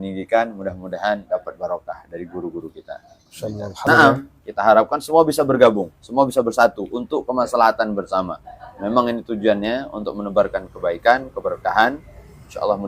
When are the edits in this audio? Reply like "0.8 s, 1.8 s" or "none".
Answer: 3.9 s